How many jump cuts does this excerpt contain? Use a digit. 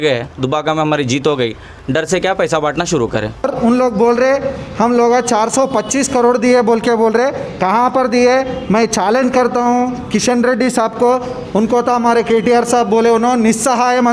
1